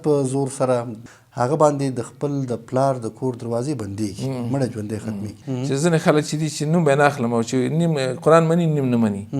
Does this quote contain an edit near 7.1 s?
no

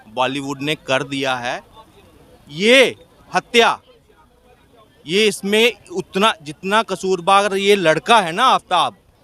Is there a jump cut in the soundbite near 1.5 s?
no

